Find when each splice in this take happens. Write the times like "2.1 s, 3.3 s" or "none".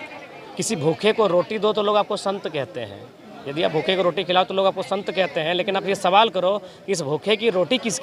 none